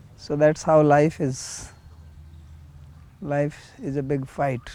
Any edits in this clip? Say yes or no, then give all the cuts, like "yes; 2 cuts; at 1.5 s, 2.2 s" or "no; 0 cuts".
no; 0 cuts